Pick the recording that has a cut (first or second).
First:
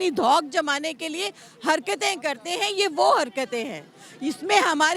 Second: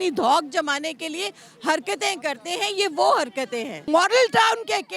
second